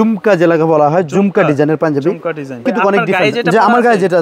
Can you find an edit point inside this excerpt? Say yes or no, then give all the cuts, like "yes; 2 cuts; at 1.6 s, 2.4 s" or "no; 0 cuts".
yes; 1 cut; at 2.6 s